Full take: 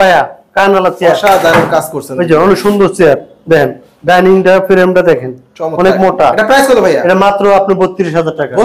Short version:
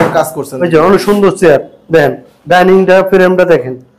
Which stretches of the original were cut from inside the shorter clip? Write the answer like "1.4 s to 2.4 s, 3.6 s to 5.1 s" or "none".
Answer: none